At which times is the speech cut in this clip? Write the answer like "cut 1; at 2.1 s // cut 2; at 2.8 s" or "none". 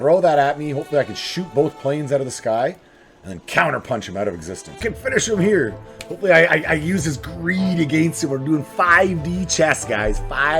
cut 1; at 4.8 s